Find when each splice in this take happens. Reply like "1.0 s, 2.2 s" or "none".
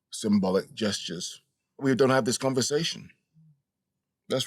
1.8 s